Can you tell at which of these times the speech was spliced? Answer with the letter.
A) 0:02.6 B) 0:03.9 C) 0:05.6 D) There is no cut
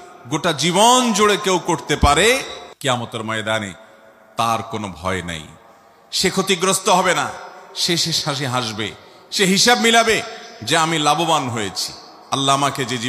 A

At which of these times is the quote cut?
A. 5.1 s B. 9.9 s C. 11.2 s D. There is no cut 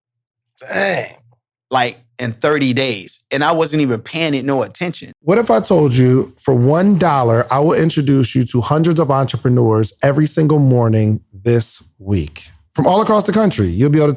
A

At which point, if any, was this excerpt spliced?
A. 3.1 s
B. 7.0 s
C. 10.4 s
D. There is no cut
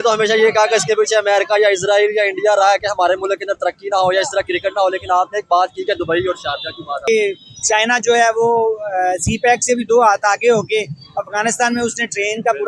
B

